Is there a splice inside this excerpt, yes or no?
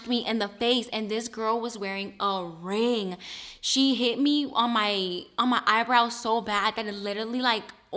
no